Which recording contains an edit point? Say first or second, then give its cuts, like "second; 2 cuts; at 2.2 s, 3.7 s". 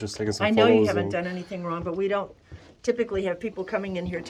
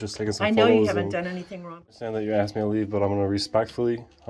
second; 1 cut; at 1.9 s